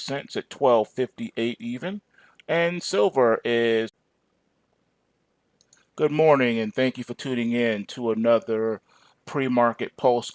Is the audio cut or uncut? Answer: uncut